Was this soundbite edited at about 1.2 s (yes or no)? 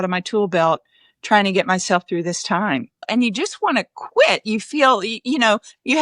no